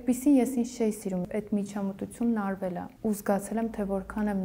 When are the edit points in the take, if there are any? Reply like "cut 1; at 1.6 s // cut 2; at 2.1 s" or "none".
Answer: cut 1; at 1.3 s // cut 2; at 2.9 s